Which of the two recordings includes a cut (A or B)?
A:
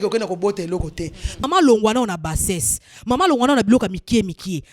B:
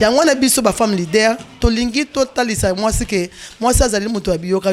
A